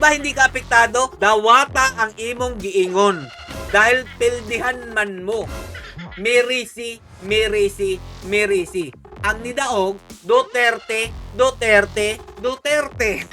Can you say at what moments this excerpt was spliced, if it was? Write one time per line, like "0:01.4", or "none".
0:12.3